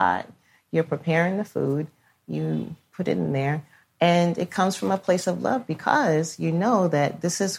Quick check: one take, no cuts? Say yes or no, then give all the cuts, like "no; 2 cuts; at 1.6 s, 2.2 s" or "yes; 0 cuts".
yes; 0 cuts